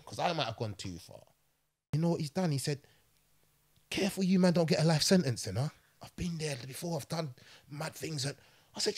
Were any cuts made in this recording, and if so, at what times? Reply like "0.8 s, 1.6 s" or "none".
1.8 s

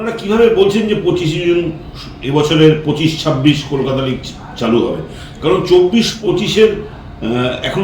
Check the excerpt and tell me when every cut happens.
6.2 s

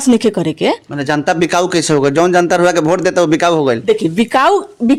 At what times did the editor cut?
none

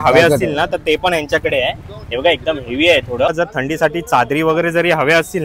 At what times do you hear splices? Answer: 3.3 s

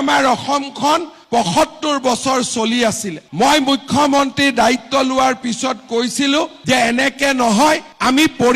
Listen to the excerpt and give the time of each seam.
3.2 s

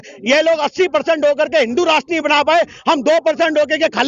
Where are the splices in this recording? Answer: none

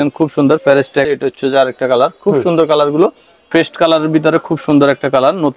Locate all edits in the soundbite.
1.1 s, 3.5 s

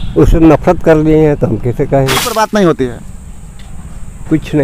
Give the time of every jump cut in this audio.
2.3 s

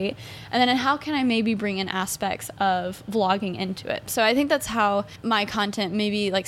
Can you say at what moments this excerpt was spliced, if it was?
5.1 s

